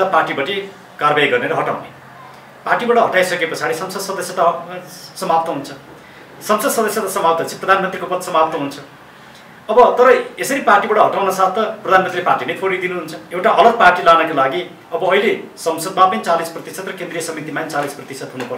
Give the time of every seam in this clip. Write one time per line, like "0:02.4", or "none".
0:13.2